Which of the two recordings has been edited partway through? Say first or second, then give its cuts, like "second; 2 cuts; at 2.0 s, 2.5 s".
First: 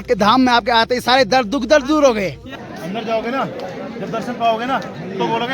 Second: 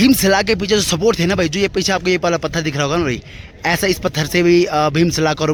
first; 1 cut; at 2.5 s